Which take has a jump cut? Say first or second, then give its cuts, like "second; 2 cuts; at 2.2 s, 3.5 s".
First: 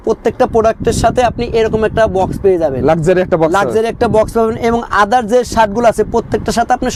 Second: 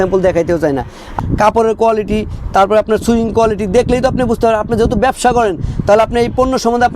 second; 1 cut; at 1.2 s